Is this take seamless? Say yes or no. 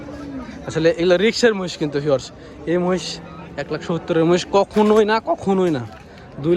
yes